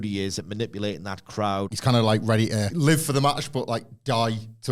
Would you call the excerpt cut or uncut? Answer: cut